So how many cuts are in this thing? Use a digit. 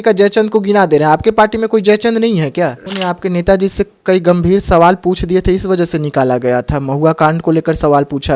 1